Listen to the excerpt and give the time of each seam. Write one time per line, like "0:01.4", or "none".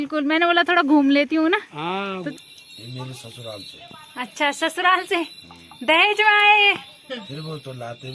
0:02.3

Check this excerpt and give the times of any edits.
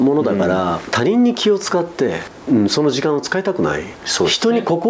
0:00.9
0:02.3
0:03.9

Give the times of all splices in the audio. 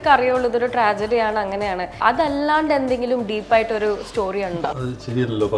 0:02.0
0:04.6

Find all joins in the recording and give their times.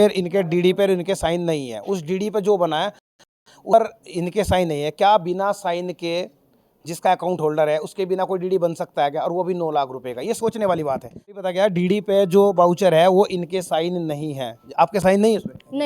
0:11.4

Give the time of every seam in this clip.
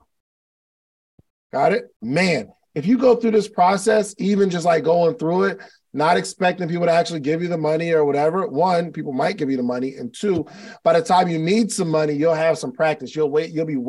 0:01.9

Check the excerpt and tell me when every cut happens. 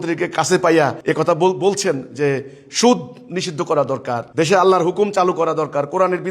0:01.0
0:04.2

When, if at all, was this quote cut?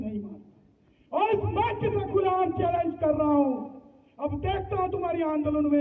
none

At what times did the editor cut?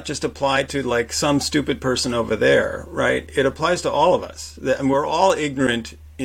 none

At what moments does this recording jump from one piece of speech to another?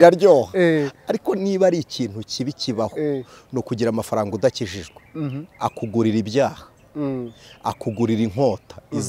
none

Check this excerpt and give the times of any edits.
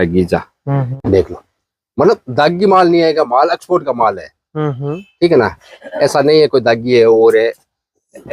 0:00.9

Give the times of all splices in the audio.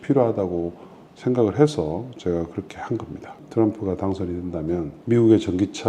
0:03.4
0:04.9

